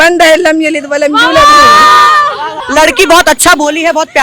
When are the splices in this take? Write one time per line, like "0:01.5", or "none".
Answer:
0:02.5